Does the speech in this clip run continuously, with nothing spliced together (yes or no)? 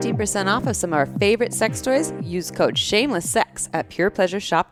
yes